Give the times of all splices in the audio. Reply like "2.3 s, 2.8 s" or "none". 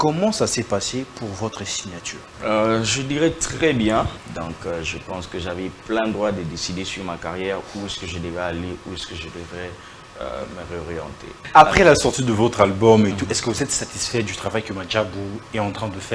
2.2 s, 4.2 s, 11.4 s